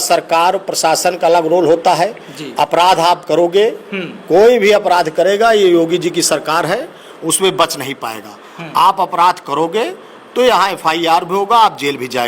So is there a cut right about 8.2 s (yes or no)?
no